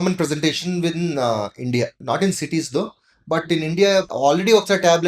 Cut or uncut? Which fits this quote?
cut